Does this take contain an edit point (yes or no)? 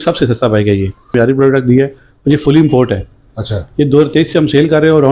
yes